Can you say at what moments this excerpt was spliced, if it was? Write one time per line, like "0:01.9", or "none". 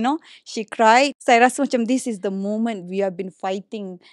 0:01.2

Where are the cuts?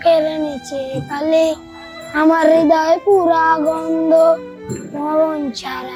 none

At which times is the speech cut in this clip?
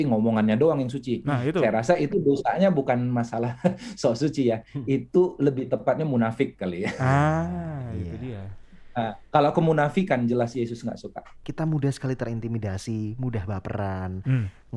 0:11.4

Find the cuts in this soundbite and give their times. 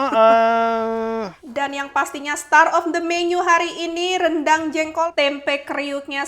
0:01.4
0:05.1

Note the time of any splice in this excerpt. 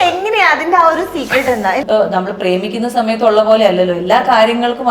0:01.8

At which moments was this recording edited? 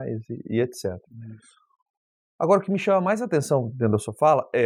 none

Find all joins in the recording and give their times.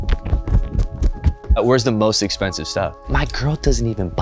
0:01.6
0:03.1

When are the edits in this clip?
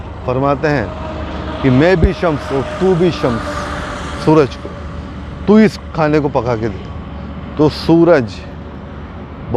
none

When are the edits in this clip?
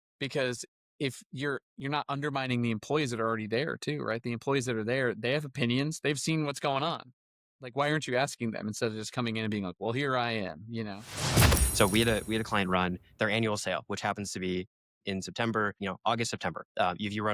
0:07.7
0:11.5

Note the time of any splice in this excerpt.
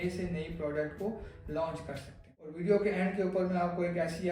0:02.5

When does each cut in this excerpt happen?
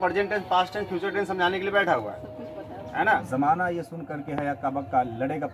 0:03.2

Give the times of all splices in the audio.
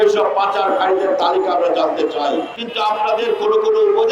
0:02.6

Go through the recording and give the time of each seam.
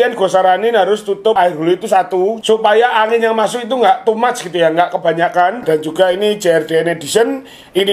0:01.4
0:05.6

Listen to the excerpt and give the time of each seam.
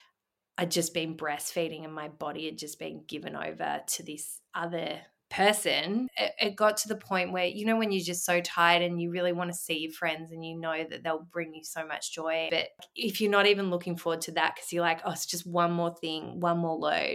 0:06.1
0:12.9

